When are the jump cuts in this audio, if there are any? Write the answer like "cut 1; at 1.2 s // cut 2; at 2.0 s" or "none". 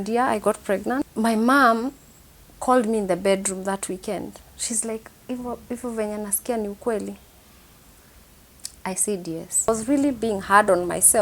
cut 1; at 1.1 s // cut 2; at 9.7 s